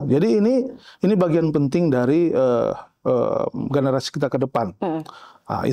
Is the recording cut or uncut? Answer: uncut